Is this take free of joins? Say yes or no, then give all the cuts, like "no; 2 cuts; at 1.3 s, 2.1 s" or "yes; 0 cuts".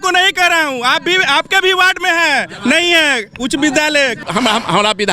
no; 1 cut; at 4.2 s